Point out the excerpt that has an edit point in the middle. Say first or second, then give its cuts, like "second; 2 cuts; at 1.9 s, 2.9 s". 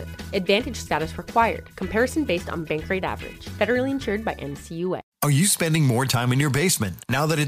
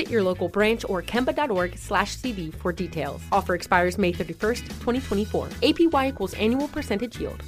first; 1 cut; at 5.1 s